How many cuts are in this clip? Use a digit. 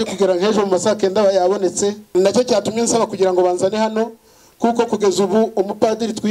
1